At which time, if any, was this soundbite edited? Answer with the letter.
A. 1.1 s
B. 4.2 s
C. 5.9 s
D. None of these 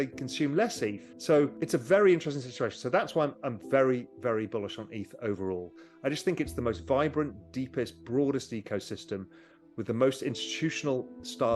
A